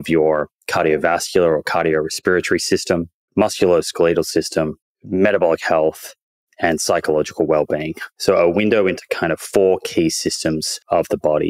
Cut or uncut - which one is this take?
uncut